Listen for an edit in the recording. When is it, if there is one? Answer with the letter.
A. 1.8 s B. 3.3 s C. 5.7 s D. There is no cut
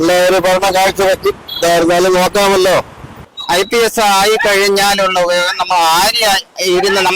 B